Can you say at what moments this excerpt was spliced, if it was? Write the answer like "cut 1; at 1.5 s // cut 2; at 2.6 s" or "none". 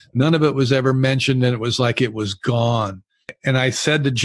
cut 1; at 3.3 s